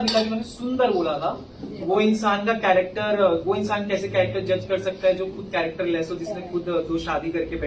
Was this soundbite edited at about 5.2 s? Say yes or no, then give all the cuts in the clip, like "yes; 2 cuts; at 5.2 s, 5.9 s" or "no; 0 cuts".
no; 1 cut; at 1.8 s